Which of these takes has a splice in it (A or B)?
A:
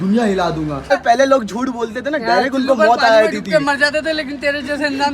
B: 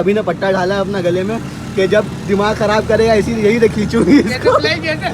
A